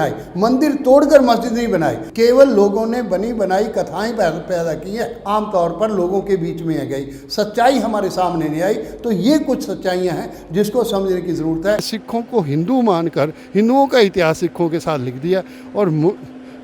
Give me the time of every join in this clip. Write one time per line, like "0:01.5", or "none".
0:02.0
0:05.2
0:11.9